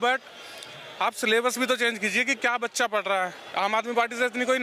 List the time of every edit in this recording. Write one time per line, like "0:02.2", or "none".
0:03.4